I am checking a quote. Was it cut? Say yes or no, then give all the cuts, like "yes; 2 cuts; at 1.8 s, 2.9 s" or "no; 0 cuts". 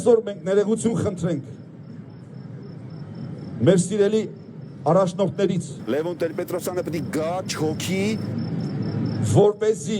yes; 2 cuts; at 5.7 s, 8.2 s